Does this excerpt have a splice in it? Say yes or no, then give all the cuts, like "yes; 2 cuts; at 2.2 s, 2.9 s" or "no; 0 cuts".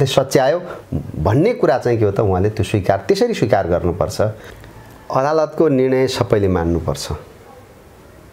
yes; 1 cut; at 4.5 s